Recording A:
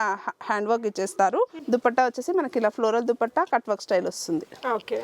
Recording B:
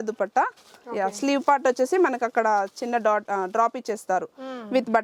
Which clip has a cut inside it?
A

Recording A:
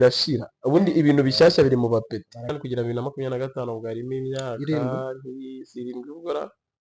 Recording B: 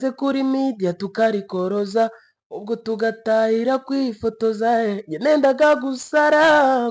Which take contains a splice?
A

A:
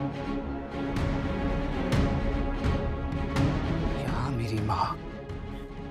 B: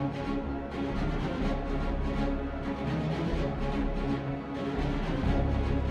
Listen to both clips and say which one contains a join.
A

